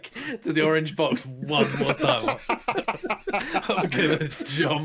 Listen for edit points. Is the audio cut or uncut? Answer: uncut